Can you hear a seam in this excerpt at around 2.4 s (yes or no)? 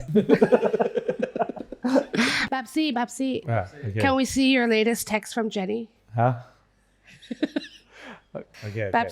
yes